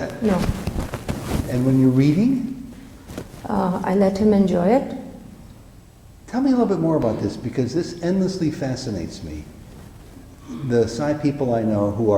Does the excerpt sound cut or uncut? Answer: uncut